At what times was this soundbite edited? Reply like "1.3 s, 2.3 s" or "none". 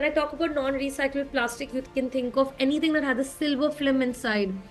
none

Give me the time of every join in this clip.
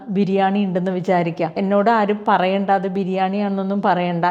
1.5 s

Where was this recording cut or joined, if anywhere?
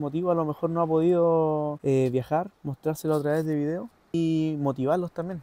1.8 s, 4.1 s

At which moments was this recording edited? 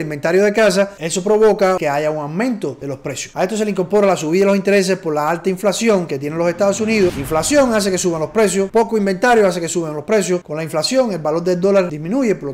7.2 s, 10.4 s

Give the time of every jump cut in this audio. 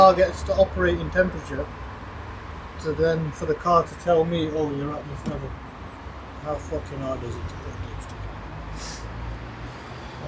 none

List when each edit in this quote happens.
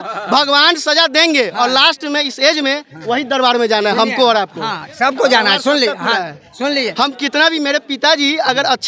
none

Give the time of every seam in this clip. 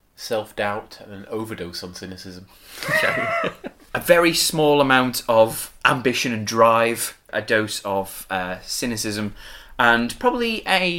3.7 s, 5.7 s, 7.3 s

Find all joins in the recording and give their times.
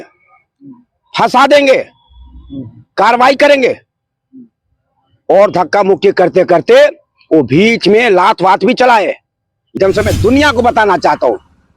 9.7 s

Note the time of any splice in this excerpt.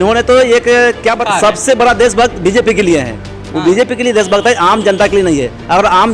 1.2 s

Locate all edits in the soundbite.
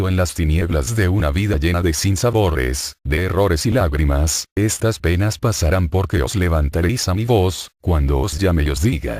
none

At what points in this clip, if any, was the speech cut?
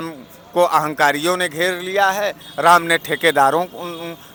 none

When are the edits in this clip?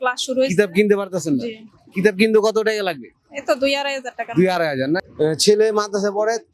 5.1 s

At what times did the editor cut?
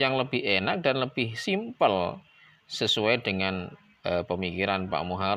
none

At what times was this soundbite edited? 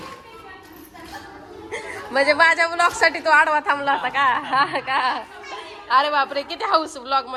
none

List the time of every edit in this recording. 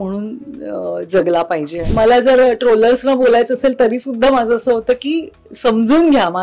1.8 s

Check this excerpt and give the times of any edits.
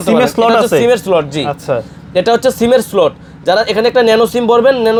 none

